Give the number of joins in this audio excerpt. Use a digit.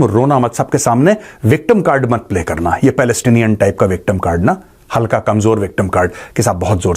0